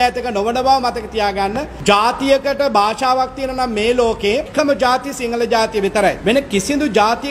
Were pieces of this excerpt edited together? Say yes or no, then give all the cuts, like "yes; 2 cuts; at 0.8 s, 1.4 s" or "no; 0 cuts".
yes; 3 cuts; at 1.7 s, 4.5 s, 6.2 s